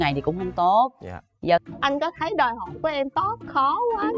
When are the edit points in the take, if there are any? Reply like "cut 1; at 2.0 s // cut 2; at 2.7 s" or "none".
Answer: cut 1; at 1.6 s